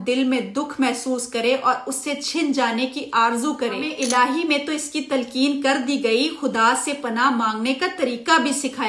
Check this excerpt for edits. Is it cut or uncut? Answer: cut